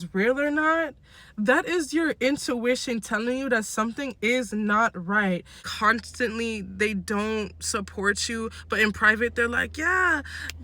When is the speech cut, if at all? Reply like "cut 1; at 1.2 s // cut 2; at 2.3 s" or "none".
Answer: cut 1; at 5.6 s